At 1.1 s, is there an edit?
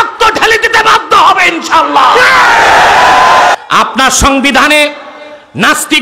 no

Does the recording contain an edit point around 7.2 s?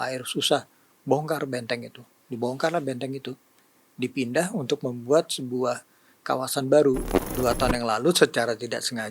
yes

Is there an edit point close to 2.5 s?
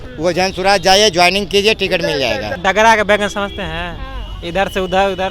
yes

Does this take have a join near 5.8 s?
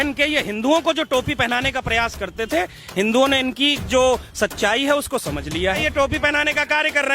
yes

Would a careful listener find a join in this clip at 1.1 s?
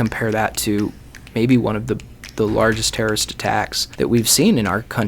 no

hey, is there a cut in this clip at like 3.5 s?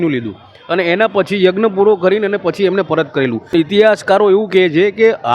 yes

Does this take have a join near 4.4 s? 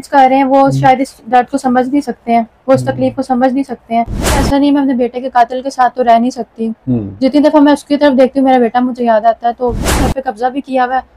yes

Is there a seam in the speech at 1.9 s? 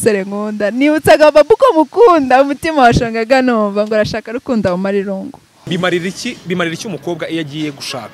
no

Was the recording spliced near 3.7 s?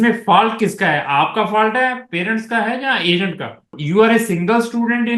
yes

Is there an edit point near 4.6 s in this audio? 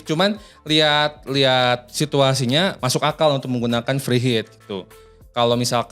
no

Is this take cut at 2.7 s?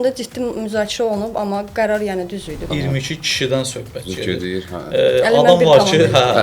yes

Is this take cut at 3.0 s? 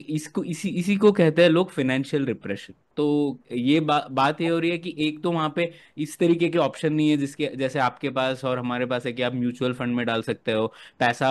no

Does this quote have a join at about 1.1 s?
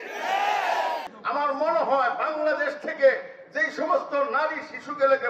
yes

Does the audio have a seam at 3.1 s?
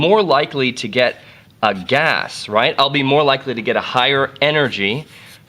yes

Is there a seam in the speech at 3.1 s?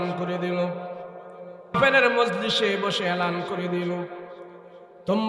no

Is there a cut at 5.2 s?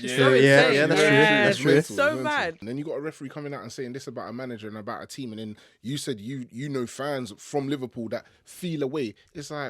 no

